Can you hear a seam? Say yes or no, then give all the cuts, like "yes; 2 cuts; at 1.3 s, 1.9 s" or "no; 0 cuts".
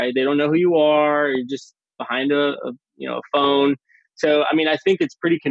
no; 0 cuts